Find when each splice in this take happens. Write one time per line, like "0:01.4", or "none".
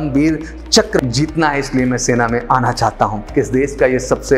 0:01.0
0:03.2